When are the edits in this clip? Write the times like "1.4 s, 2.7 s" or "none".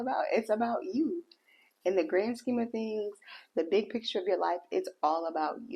none